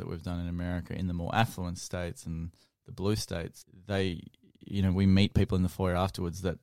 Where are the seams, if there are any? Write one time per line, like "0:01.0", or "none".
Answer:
0:03.7